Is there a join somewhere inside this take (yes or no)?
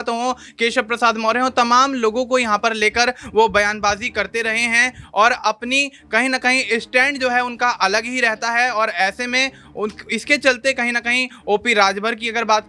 no